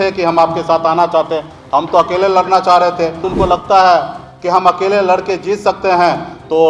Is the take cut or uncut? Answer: cut